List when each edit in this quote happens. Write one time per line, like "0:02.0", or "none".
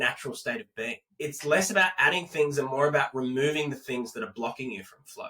0:01.0